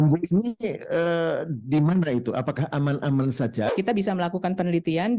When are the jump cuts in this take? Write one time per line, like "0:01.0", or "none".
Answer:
0:03.7